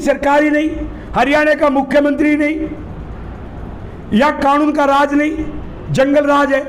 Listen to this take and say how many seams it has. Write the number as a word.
zero